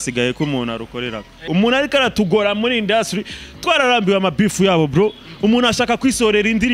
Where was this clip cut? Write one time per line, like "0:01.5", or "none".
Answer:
0:01.5